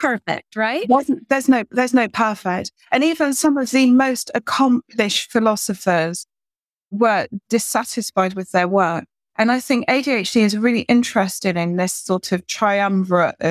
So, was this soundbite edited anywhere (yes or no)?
no